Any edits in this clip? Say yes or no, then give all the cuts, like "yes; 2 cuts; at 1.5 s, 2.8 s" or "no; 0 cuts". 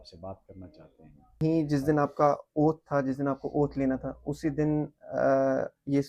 yes; 1 cut; at 1.4 s